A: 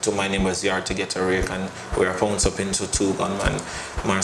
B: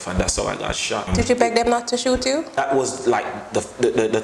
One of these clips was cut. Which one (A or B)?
B